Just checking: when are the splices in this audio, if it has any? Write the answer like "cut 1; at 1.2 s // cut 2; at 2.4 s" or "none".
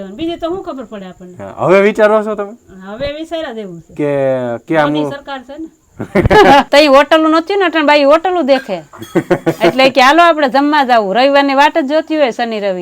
cut 1; at 6.7 s